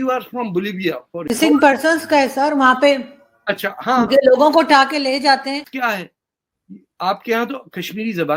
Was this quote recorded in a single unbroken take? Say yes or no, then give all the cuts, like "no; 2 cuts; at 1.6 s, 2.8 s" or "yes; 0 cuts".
no; 2 cuts; at 1.3 s, 5.7 s